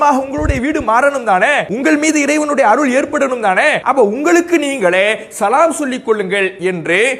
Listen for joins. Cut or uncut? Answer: cut